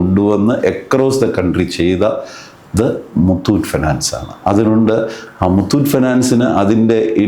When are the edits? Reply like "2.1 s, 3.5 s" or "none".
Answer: none